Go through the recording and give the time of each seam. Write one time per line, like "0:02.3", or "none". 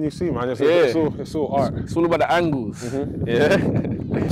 none